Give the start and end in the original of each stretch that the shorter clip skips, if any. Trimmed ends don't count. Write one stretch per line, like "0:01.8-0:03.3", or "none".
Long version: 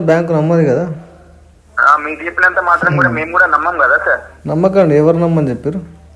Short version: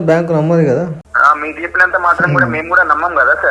0:01.0-0:01.7